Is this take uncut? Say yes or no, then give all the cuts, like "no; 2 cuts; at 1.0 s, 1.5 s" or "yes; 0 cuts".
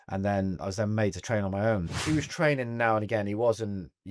no; 1 cut; at 1.9 s